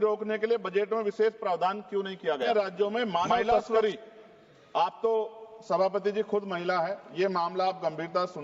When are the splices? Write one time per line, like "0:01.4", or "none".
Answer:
0:02.5